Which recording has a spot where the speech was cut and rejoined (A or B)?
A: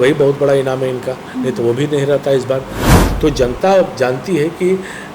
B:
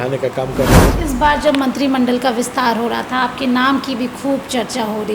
B